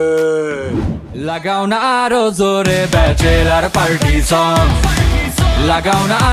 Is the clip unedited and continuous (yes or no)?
no